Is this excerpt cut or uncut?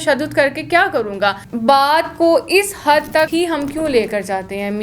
cut